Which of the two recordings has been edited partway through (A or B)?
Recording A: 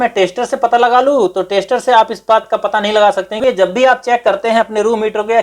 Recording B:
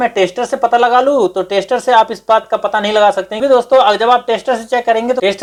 A